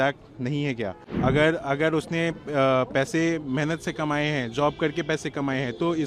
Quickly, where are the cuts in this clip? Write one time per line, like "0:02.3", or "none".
0:01.1